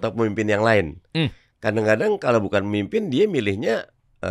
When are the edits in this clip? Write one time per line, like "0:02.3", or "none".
none